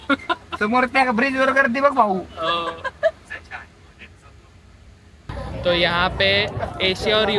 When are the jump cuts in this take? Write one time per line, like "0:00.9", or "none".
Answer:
0:05.3

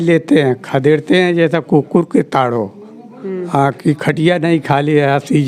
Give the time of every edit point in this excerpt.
none

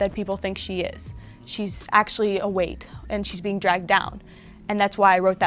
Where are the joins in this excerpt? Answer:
none

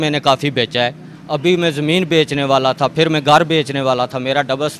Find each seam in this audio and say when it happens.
none

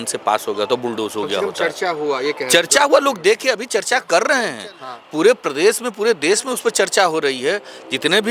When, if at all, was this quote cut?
none

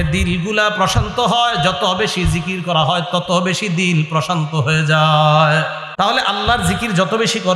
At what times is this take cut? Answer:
0:05.8

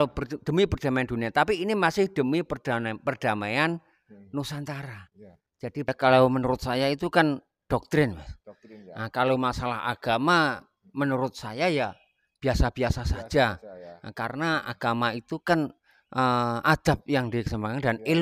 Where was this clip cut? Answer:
0:05.9

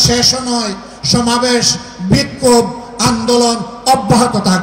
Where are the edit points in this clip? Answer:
none

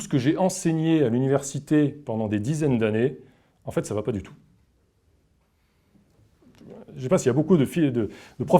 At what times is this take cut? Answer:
none

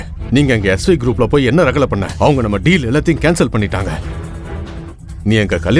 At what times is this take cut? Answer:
none

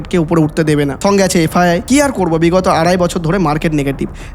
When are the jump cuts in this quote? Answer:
0:00.9
0:01.8

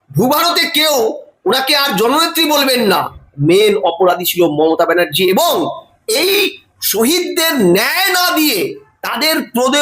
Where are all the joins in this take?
0:03.2

